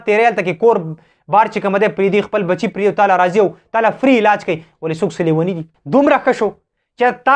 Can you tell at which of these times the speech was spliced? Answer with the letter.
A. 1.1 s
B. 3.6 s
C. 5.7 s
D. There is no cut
C